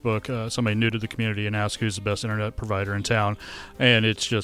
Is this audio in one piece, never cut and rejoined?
yes; 0 cuts

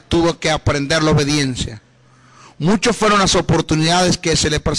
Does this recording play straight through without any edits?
no; 1 cut; at 3.8 s

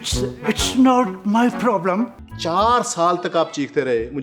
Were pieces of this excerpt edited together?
yes; 1 cut; at 2.2 s

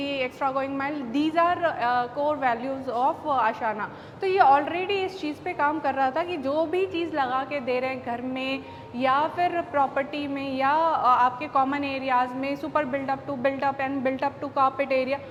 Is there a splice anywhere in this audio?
no; 0 cuts

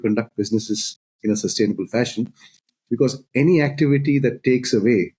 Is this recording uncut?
yes; 0 cuts

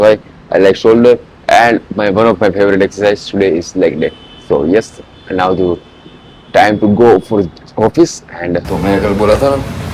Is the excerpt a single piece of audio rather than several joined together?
yes; 0 cuts

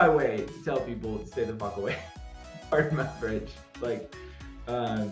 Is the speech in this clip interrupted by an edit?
no; 0 cuts

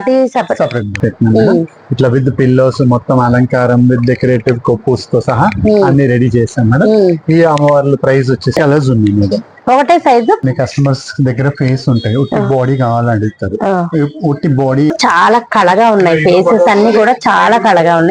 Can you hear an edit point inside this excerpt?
yes; 4 cuts; at 0.9 s, 8.6 s, 10.4 s, 14.9 s

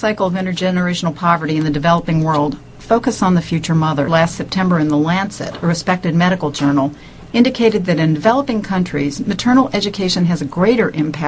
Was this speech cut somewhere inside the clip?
no; 0 cuts

